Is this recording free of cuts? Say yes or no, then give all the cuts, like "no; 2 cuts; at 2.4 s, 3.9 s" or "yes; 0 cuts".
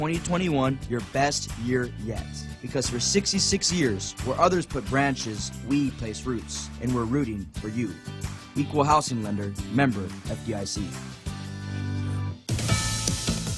no; 1 cut; at 12.4 s